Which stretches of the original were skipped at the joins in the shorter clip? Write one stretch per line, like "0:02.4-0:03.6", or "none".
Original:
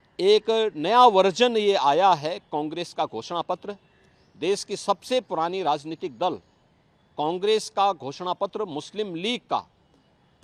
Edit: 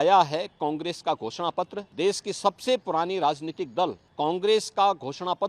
0:03.7-0:04.3
0:06.5-0:07.0